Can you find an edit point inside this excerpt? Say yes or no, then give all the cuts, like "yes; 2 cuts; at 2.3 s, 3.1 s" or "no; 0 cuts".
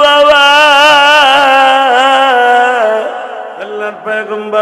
yes; 1 cut; at 3.7 s